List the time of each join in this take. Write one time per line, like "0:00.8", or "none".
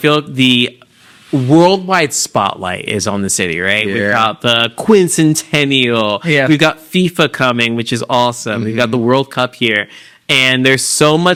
none